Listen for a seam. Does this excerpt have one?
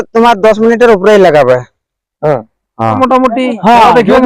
yes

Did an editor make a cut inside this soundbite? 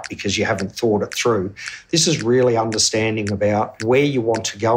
yes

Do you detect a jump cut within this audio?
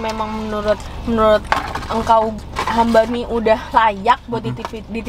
no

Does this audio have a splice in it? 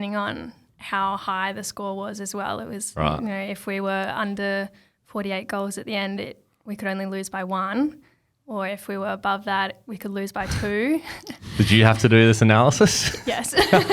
no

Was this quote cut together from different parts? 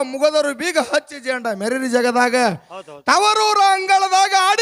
no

